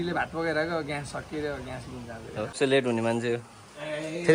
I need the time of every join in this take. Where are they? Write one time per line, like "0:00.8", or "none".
0:02.5